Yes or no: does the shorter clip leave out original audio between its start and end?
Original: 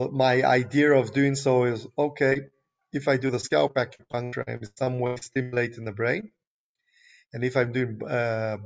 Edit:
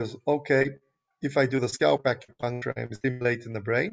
yes